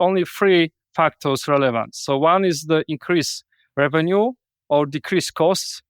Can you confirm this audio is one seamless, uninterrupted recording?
yes; 0 cuts

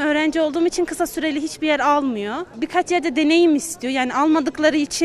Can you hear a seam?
yes; 1 cut; at 2.5 s

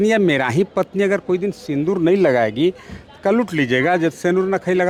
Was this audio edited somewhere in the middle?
no; 0 cuts

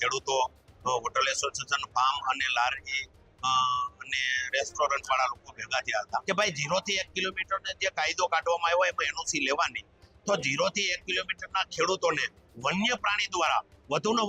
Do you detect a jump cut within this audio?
yes; 1 cut; at 6.2 s

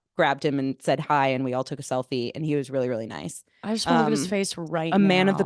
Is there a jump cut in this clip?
no; 0 cuts

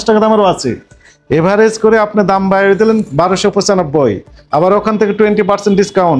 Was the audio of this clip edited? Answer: no; 0 cuts

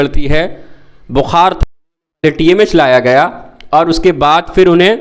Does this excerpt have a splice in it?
no; 0 cuts

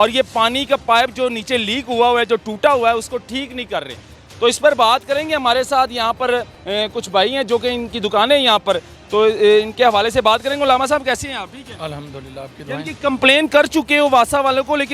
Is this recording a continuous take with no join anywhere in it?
yes; 0 cuts

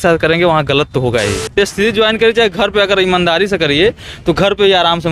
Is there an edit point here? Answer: yes; 1 cut; at 1.5 s

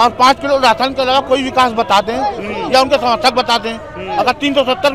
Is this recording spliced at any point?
no; 0 cuts

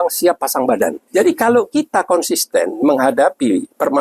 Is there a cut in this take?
yes; 1 cut; at 1.0 s

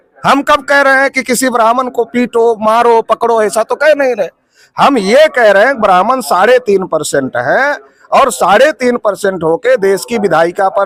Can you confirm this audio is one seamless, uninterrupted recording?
yes; 0 cuts

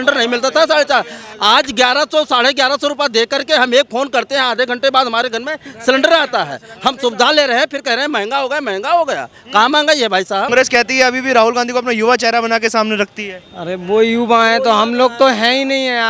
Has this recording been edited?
no; 0 cuts

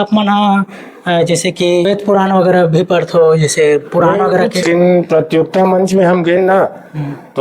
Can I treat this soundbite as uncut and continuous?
no; 2 cuts; at 1.9 s, 4.6 s

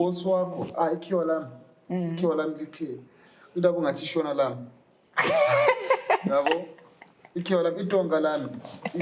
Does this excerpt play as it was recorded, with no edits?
yes; 0 cuts

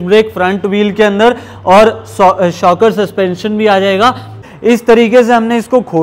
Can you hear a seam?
yes; 1 cut; at 4.5 s

